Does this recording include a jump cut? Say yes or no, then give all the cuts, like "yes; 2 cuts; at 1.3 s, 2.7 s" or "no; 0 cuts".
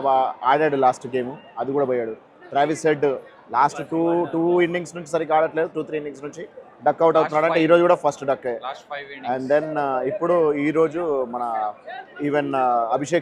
no; 0 cuts